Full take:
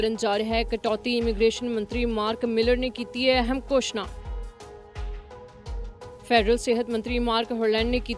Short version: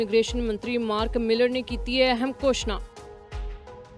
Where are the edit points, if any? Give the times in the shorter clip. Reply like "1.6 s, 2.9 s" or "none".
2.8 s